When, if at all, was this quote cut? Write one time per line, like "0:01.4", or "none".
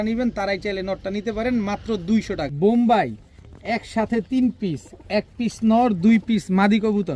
0:02.5